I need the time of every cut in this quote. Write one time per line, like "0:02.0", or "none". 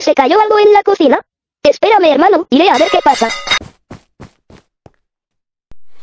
0:03.5